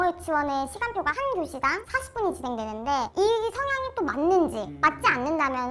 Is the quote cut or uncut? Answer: cut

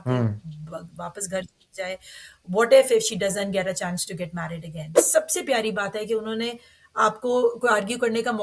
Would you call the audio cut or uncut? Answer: cut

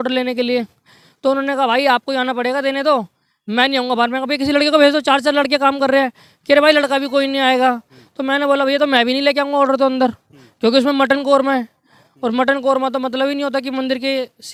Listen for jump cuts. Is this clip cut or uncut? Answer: uncut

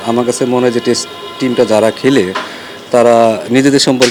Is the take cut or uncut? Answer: uncut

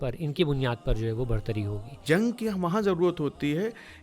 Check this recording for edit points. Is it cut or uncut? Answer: cut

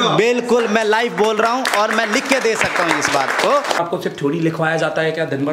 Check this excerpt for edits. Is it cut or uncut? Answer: cut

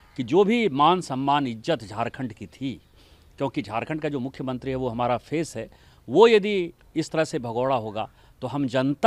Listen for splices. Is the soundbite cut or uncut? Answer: uncut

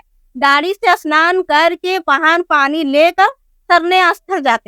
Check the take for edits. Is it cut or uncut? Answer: uncut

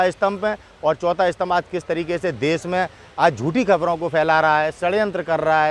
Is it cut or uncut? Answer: uncut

